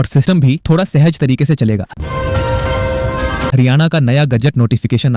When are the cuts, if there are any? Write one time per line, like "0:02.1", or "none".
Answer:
none